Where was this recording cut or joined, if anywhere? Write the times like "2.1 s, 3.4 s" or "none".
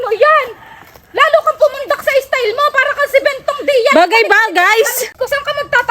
5.0 s